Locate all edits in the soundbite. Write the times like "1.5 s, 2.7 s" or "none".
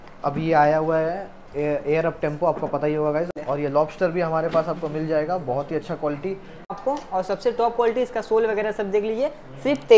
3.4 s, 6.8 s